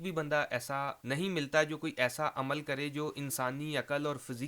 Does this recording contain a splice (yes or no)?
yes